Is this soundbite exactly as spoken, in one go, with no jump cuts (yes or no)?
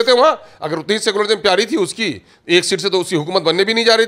yes